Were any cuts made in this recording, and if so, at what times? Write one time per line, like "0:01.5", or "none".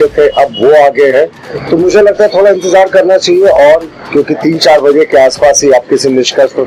none